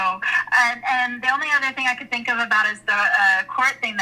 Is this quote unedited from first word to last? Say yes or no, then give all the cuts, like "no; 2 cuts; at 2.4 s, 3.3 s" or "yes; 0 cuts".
yes; 0 cuts